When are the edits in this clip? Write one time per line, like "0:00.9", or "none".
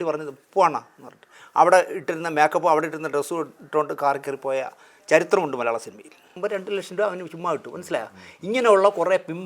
0:06.3

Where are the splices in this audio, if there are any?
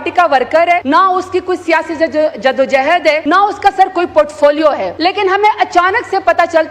0:00.8
0:03.2
0:04.9

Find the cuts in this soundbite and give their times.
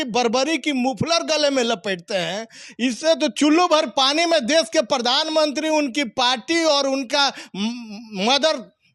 0:02.6

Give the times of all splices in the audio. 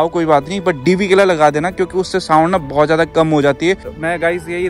0:03.8

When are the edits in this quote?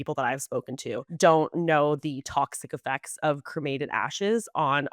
0:01.1

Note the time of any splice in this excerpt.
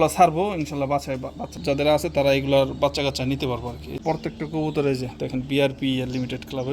0:01.6
0:03.9

